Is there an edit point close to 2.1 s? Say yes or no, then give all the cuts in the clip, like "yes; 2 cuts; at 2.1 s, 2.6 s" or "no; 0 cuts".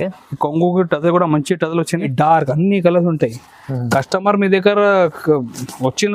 yes; 1 cut; at 2.1 s